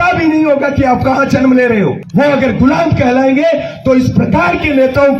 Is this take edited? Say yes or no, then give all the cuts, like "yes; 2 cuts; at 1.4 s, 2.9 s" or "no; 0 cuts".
yes; 1 cut; at 2.0 s